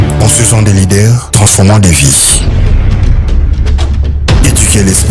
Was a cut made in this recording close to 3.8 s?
no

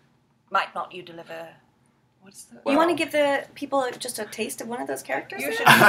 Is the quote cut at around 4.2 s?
no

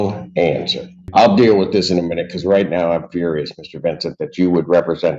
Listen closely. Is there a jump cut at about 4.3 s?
no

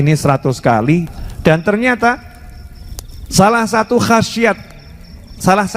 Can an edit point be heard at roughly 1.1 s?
yes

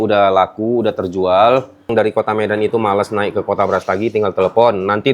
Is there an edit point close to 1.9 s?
yes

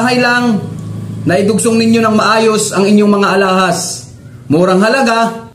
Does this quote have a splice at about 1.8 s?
no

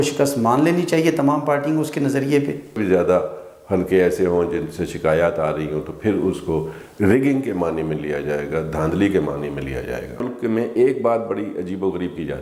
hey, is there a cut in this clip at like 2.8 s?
yes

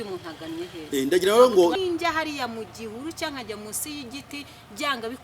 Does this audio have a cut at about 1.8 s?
yes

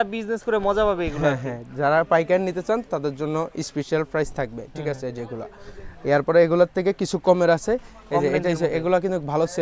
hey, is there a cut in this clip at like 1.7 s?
no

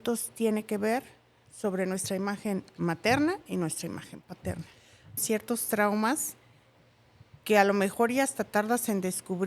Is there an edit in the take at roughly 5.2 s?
yes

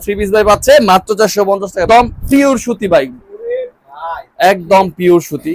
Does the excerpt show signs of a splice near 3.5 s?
no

